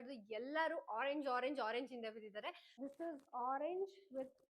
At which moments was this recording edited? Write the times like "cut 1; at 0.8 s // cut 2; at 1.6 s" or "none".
cut 1; at 2.7 s